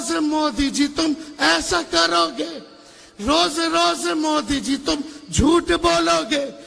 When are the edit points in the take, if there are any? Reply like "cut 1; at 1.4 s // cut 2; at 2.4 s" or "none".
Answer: none